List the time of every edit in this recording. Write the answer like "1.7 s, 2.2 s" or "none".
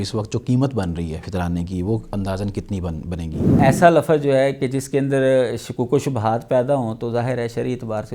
1.2 s, 3.6 s